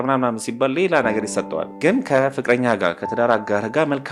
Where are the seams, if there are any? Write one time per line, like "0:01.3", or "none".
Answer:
0:01.7